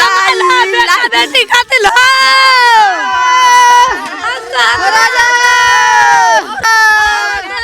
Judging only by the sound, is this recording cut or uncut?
cut